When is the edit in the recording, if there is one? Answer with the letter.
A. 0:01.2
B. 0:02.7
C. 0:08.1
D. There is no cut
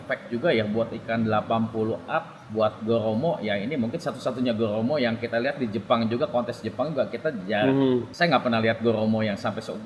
D